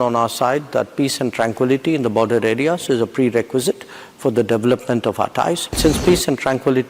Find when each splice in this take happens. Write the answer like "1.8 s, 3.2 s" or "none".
5.7 s